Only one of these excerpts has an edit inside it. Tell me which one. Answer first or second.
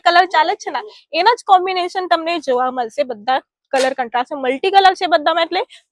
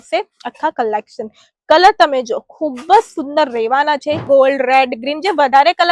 second